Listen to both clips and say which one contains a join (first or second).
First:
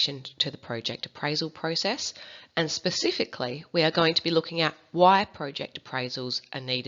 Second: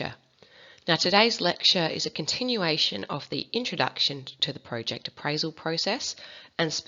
first